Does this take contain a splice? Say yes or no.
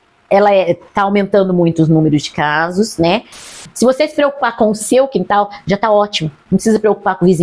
yes